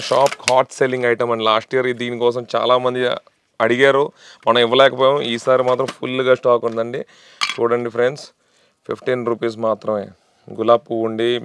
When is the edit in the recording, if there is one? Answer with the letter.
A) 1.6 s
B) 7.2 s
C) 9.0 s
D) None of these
D